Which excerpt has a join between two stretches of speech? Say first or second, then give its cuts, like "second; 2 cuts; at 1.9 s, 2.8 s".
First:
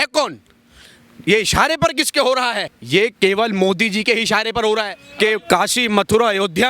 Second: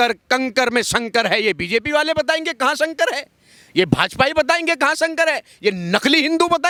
first; 2 cuts; at 2.7 s, 5.0 s